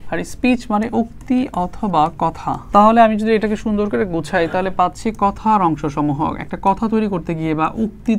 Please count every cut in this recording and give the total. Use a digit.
1